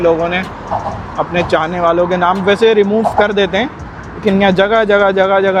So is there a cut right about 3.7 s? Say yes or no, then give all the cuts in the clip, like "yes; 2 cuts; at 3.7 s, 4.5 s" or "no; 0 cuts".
no; 0 cuts